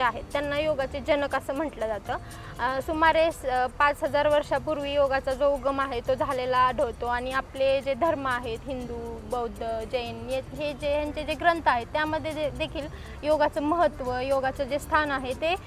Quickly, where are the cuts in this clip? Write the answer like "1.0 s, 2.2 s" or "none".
none